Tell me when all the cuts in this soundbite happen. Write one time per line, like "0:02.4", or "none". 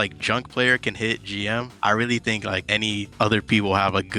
0:01.7
0:02.9